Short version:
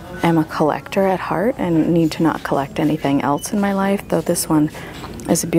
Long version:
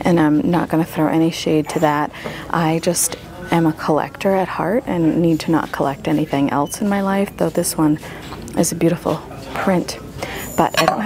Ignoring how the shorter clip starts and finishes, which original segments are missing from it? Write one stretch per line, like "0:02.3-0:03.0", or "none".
none